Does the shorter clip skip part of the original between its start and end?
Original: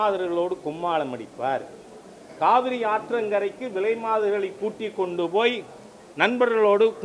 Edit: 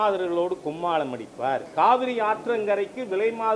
yes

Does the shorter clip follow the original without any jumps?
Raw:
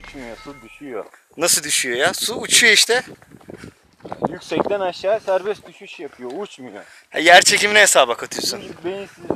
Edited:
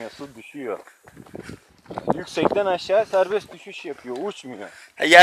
no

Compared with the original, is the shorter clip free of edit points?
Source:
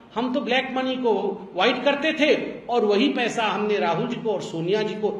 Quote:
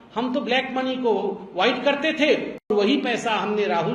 no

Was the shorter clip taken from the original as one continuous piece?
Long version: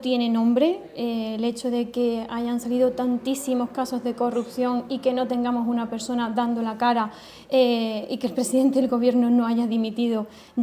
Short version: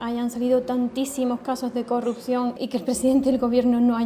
no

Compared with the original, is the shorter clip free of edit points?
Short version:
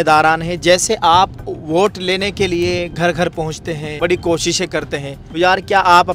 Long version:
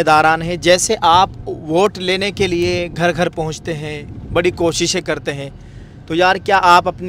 no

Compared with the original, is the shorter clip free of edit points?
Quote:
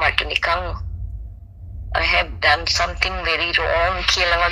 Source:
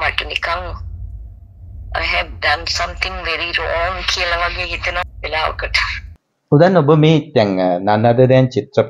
yes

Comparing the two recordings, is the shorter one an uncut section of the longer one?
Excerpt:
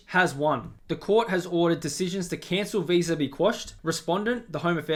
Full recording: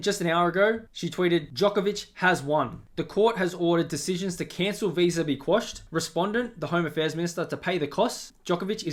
yes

